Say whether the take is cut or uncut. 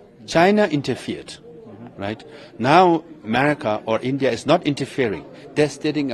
uncut